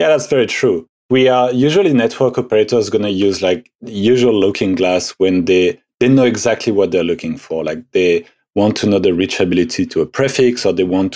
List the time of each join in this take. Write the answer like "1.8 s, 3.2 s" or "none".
0.9 s